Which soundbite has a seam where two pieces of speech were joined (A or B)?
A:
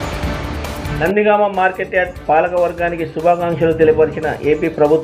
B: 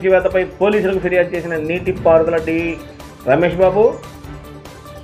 A